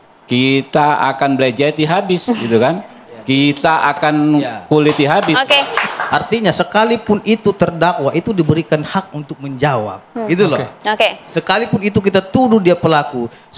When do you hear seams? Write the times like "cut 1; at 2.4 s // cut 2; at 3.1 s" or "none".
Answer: cut 1; at 5.9 s